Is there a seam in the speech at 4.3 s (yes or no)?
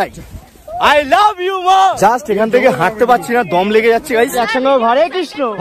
yes